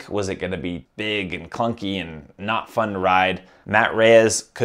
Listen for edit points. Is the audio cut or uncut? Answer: cut